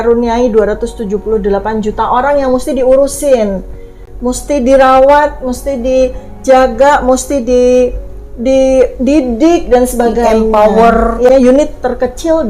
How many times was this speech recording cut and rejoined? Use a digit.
1